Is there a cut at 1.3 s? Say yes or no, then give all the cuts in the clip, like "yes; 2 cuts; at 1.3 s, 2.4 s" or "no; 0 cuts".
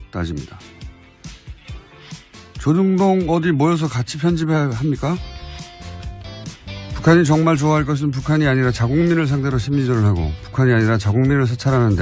yes; 1 cut; at 1.3 s